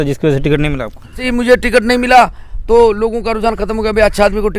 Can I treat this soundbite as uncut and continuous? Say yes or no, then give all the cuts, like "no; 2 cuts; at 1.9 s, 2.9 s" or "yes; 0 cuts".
no; 1 cut; at 1.2 s